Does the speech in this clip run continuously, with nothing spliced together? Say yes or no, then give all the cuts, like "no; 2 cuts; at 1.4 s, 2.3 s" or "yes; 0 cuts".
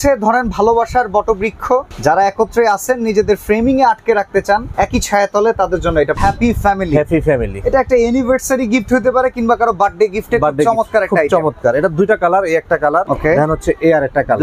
no; 4 cuts; at 1.9 s, 4.7 s, 6.2 s, 13.1 s